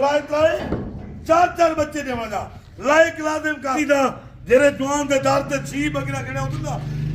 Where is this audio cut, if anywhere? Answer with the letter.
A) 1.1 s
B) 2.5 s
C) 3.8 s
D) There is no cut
C